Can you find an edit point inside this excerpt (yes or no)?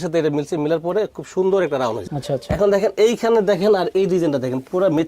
yes